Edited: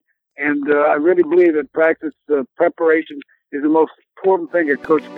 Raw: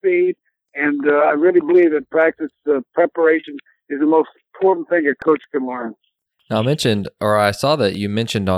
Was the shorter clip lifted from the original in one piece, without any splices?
yes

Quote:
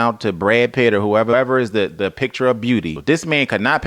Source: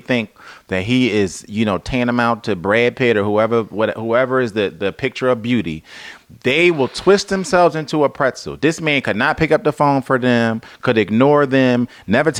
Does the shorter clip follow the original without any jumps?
no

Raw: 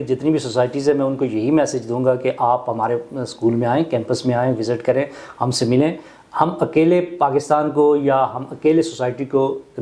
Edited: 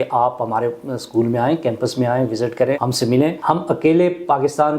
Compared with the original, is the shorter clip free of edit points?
no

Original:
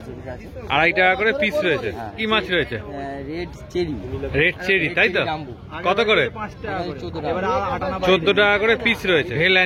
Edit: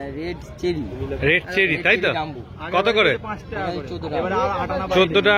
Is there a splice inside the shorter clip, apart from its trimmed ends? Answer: no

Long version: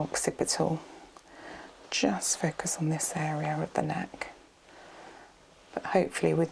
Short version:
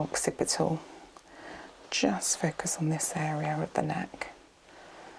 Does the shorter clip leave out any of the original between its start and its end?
no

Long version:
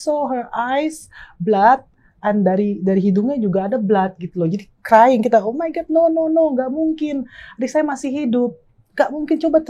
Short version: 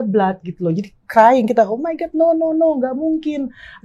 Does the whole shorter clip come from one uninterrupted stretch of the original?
yes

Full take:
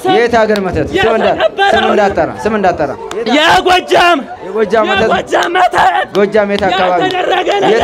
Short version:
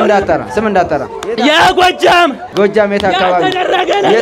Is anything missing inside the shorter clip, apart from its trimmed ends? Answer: yes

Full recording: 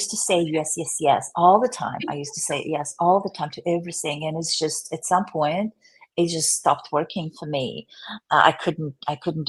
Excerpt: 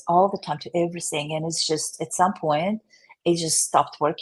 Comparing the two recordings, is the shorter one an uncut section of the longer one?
yes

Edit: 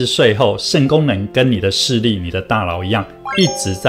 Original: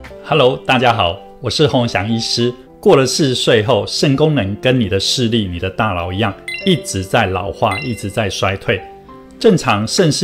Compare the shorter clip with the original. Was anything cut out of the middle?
no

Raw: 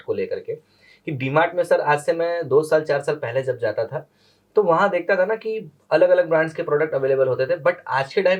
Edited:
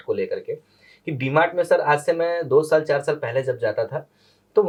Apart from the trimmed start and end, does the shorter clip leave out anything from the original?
no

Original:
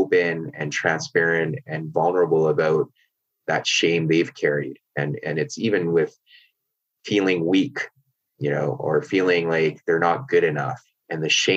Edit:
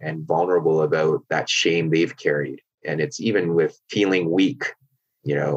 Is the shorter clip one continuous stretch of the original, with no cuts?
no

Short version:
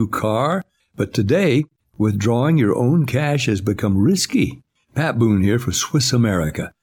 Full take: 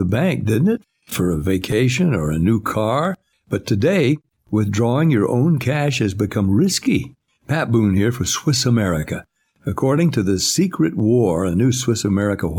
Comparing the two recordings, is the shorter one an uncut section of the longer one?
yes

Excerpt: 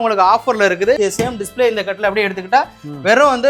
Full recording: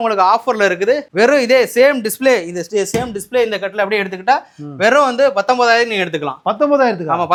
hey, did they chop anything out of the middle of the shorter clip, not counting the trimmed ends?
yes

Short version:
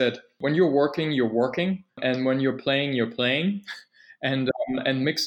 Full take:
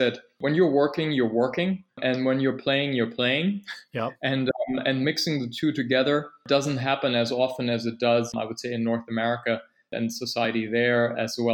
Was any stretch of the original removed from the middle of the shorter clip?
no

